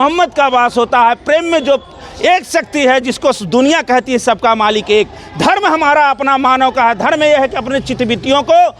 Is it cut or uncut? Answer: uncut